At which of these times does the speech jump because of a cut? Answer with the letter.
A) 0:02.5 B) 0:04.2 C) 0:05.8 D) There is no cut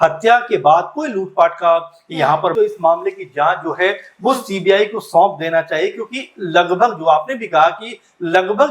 A